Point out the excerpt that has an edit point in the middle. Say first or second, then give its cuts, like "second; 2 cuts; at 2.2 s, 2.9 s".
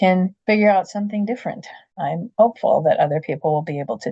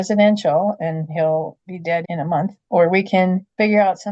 first; 1 cut; at 2.0 s